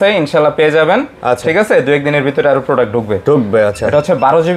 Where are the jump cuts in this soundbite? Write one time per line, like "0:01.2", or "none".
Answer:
none